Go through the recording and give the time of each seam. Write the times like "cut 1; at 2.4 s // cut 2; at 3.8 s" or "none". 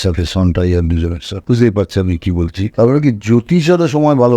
cut 1; at 1.3 s // cut 2; at 2.6 s